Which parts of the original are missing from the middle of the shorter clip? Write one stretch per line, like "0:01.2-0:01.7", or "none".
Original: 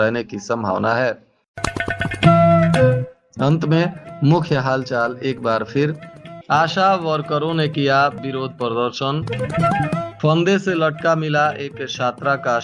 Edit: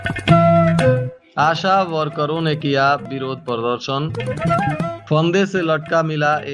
0:03.1-0:06.3